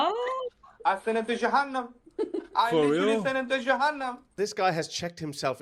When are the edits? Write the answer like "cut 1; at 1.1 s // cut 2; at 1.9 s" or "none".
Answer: cut 1; at 4.3 s

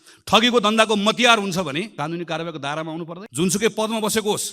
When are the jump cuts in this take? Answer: cut 1; at 1.9 s // cut 2; at 3.2 s

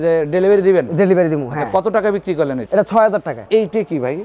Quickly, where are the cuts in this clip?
cut 1; at 2.6 s // cut 2; at 3.4 s

